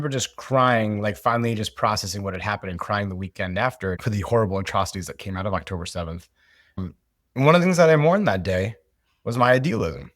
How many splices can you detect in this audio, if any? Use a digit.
2